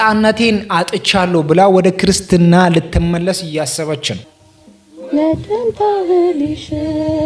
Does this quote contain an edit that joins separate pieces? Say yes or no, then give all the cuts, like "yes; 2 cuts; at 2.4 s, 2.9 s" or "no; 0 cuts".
no; 0 cuts